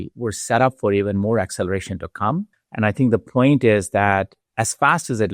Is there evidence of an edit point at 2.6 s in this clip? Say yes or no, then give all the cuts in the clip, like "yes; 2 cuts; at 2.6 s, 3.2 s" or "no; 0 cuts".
yes; 2 cuts; at 2.6 s, 4.4 s